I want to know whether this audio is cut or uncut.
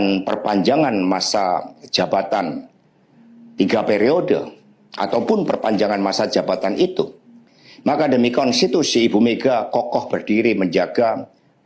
uncut